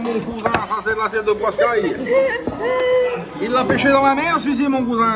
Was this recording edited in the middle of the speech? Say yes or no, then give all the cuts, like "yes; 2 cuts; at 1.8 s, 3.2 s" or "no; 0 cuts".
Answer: no; 0 cuts